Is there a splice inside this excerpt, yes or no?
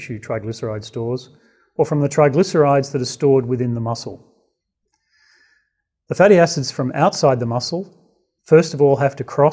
no